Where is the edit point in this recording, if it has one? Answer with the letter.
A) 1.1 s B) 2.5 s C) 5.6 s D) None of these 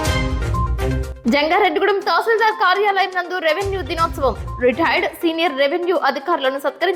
A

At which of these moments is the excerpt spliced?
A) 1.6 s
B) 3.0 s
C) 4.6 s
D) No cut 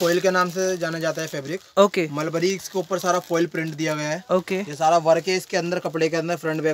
D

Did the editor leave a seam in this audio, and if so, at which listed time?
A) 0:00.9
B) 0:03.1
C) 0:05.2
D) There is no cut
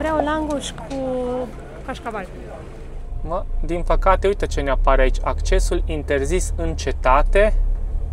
B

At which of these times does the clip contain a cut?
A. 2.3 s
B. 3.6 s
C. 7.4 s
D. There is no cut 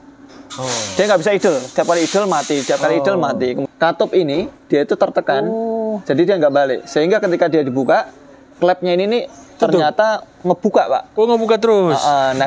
B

